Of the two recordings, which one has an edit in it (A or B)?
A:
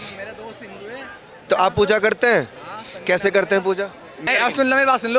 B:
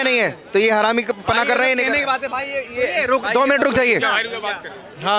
A